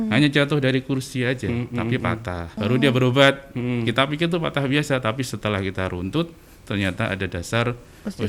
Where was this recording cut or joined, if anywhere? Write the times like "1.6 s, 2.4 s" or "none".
2.6 s